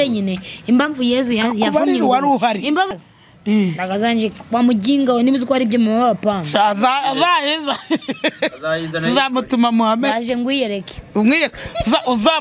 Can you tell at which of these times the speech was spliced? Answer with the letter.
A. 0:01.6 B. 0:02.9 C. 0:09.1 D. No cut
B